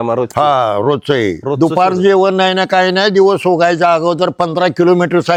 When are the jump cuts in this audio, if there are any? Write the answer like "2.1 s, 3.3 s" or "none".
none